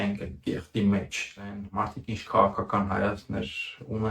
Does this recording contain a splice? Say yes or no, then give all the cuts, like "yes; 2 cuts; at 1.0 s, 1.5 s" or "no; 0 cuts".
yes; 1 cut; at 1.6 s